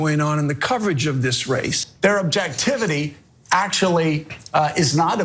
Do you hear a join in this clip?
yes; 1 cut; at 1.8 s

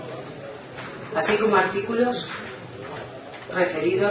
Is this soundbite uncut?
no; 1 cut; at 2.9 s

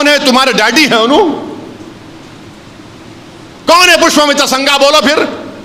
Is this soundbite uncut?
yes; 0 cuts

